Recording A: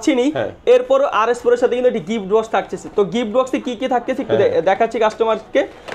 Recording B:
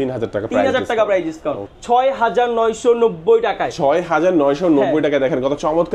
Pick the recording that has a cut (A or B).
B